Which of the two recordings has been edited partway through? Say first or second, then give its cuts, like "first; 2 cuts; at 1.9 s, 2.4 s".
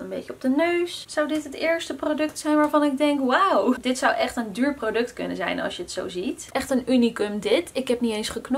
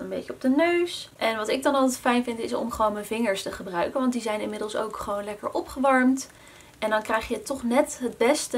first; 3 cuts; at 1.0 s, 3.8 s, 6.4 s